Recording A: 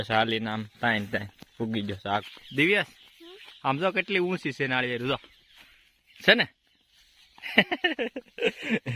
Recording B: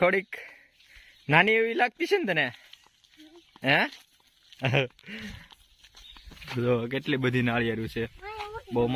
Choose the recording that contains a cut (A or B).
A